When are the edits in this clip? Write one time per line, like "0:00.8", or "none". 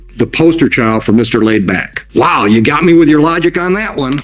0:02.0